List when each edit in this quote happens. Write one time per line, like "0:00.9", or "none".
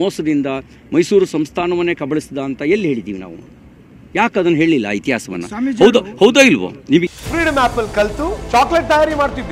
0:02.6
0:07.0